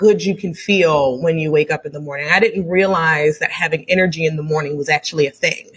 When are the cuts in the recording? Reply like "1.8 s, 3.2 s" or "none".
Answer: none

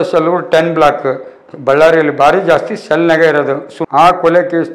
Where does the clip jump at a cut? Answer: 3.7 s

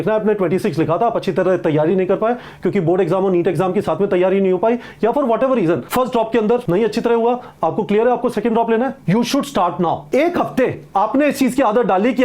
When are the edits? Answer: 5.8 s, 6.6 s, 9.0 s, 10.0 s

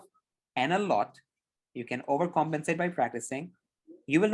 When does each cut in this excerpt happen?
none

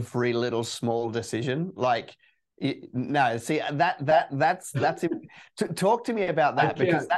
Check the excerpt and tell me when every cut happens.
none

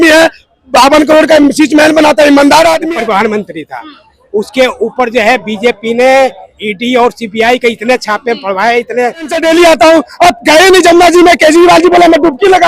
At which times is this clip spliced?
2.8 s, 9.4 s

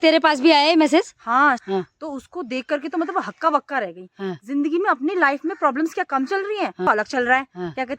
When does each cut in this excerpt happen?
1.6 s, 6.9 s

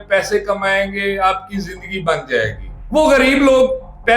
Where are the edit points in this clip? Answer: none

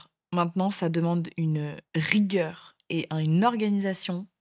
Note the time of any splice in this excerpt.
1.8 s

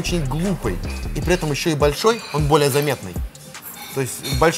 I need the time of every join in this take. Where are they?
none

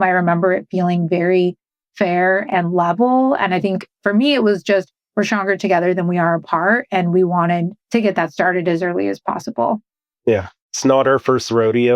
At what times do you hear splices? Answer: 7.8 s, 10.6 s

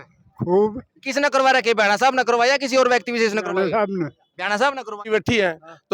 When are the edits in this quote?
5.0 s

